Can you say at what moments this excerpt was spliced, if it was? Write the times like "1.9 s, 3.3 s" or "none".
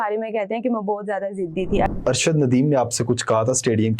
1.9 s